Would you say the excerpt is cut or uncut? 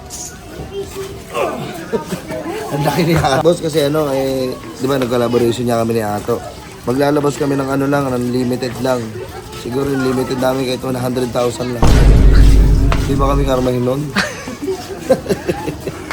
cut